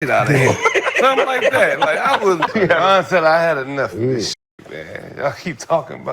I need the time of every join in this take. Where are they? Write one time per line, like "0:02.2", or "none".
0:02.5